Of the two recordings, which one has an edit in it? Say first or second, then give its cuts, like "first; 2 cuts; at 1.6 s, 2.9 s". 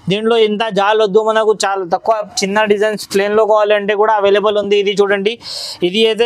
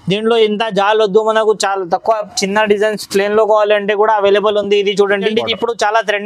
second; 1 cut; at 5.3 s